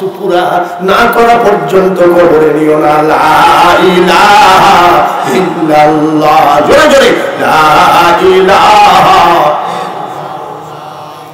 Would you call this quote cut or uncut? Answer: uncut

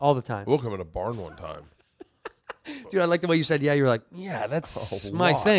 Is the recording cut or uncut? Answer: uncut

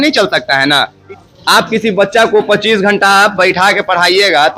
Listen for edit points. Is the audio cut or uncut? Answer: cut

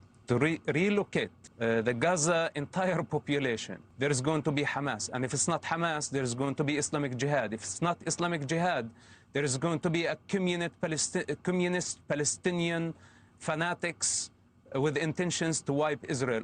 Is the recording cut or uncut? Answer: cut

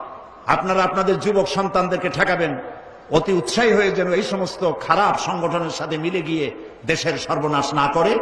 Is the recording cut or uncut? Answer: uncut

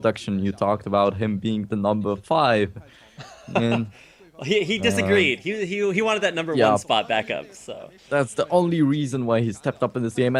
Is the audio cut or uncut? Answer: uncut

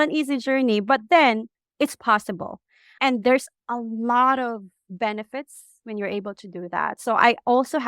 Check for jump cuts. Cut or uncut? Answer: cut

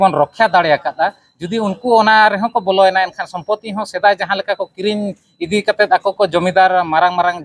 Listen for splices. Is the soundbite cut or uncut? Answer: uncut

